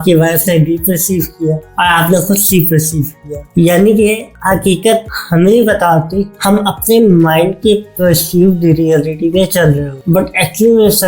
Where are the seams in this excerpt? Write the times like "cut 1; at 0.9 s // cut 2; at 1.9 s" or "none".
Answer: cut 1; at 9.9 s